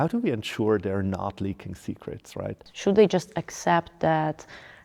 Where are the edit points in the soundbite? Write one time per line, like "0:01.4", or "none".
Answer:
0:02.7